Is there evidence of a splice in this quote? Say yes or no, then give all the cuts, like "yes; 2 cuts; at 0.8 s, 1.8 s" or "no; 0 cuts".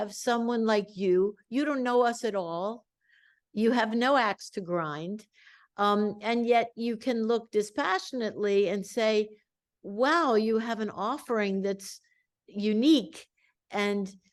no; 0 cuts